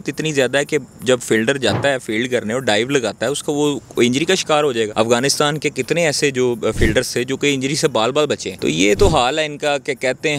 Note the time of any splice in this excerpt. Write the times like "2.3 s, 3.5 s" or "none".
4.9 s, 8.5 s